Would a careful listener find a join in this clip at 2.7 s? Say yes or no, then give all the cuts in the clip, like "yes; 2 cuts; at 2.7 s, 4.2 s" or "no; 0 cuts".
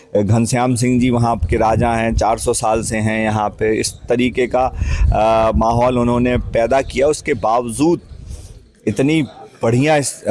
no; 0 cuts